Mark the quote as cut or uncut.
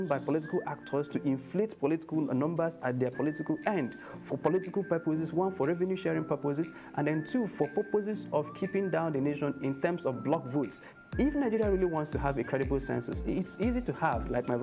cut